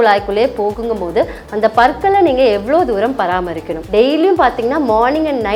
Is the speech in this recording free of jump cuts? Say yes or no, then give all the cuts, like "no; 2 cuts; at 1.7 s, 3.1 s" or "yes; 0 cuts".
yes; 0 cuts